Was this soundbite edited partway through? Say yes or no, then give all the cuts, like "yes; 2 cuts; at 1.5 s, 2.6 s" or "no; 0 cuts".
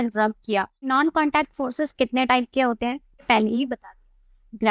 yes; 2 cuts; at 0.9 s, 3.1 s